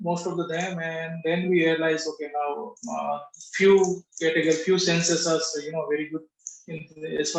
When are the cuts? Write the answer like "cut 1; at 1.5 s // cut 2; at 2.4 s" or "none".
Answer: none